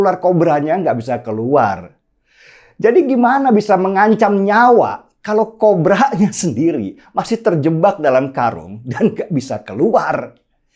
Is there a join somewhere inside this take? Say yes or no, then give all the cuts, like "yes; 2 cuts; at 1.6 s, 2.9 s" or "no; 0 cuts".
no; 0 cuts